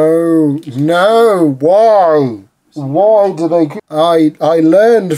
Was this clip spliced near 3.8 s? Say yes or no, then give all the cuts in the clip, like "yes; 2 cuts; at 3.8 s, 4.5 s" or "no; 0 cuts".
yes; 1 cut; at 3.8 s